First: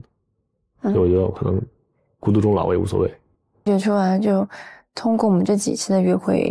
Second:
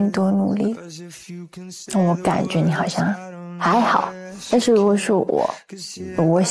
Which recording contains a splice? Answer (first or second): first